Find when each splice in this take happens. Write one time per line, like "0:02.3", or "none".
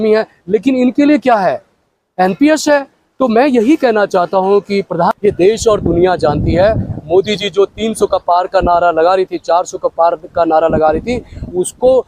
0:04.9